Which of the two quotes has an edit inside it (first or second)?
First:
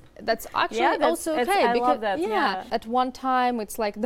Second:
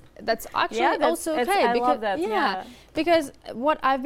first